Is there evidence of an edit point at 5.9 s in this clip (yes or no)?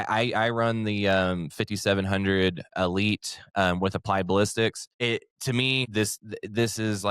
yes